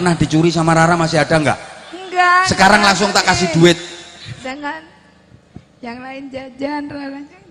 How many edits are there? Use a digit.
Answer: 1